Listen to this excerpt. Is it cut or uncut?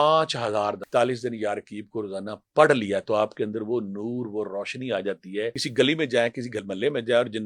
cut